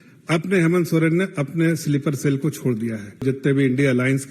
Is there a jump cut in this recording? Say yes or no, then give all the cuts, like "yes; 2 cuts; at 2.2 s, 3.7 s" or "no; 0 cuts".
yes; 1 cut; at 3.2 s